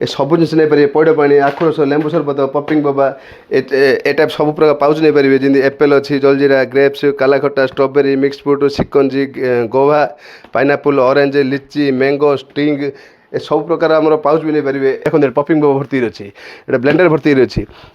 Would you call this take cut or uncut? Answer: cut